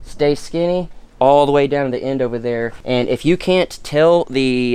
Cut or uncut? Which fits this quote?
cut